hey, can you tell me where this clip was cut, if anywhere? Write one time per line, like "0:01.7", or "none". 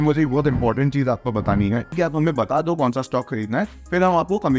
0:01.9